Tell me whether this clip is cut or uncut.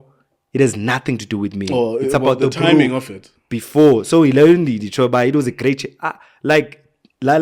uncut